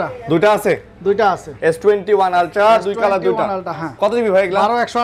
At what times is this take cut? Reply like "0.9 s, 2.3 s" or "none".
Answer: none